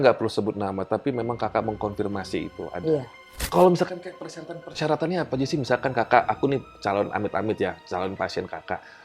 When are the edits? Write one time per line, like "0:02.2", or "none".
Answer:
0:03.3